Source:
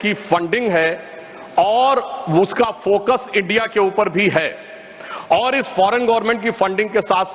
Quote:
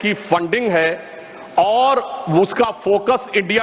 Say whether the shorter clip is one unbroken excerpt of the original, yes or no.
yes